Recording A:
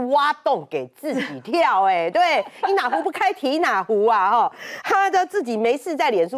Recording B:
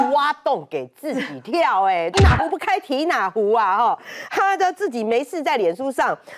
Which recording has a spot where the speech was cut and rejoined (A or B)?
B